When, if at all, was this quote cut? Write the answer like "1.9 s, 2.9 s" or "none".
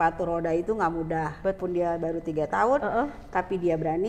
1.6 s